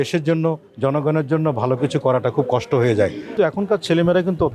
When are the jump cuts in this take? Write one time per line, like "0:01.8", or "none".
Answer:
0:03.3

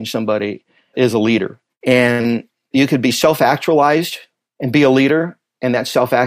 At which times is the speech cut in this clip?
0:00.9

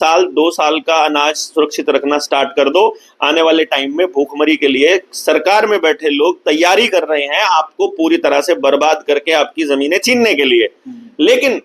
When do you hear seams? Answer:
none

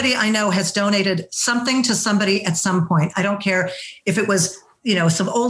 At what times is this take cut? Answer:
none

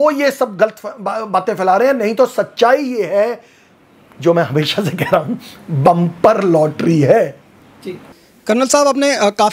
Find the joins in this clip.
none

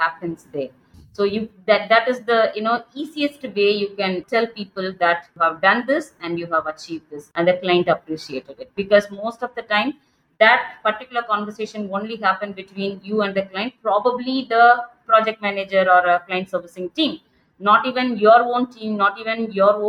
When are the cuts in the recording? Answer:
0:04.2
0:05.3
0:07.2

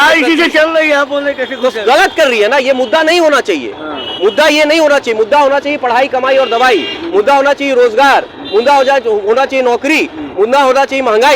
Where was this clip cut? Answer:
none

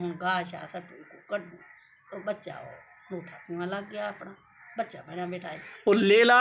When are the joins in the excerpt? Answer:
none

